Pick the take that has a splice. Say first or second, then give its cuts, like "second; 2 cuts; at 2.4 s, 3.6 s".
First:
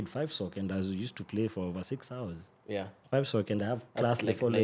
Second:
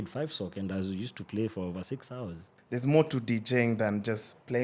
second; 1 cut; at 2.5 s